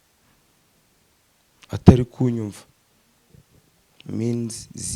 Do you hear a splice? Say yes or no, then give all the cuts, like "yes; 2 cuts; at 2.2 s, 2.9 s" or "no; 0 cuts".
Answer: no; 0 cuts